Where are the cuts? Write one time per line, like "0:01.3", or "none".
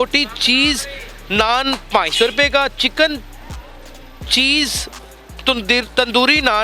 none